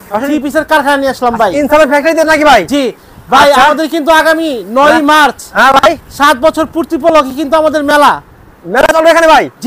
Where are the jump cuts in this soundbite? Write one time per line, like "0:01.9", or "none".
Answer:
none